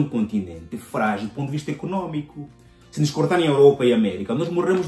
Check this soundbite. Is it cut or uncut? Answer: uncut